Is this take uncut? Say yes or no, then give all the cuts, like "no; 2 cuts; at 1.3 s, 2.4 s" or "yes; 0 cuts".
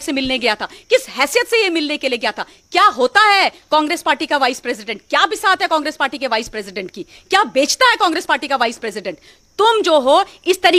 yes; 0 cuts